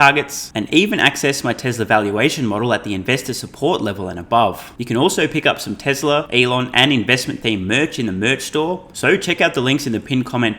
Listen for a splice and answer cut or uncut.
cut